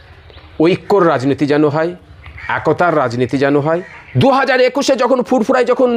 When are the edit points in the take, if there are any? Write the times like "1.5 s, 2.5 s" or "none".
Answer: 4.0 s